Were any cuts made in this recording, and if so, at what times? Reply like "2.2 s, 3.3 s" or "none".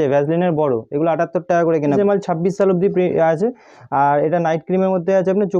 1.9 s